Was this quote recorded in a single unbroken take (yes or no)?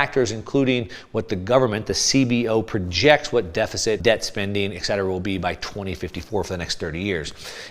no